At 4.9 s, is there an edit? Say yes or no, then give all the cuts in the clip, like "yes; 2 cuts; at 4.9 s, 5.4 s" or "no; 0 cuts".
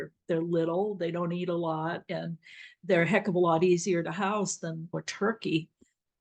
yes; 1 cut; at 4.9 s